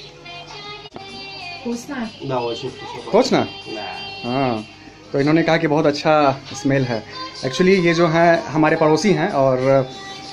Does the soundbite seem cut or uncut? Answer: cut